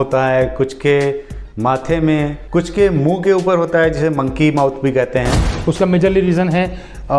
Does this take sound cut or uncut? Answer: cut